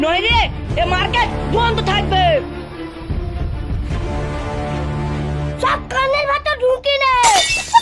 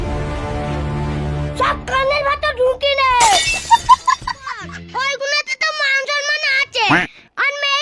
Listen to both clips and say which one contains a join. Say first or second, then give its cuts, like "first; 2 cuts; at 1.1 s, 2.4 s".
second; 1 cut; at 4.7 s